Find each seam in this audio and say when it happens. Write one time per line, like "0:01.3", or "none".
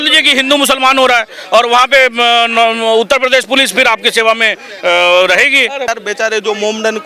0:05.9